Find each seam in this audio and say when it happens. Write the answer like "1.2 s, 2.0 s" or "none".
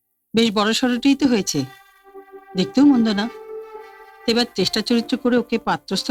none